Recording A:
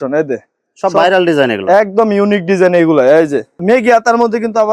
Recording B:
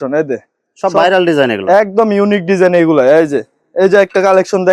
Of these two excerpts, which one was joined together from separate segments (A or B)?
A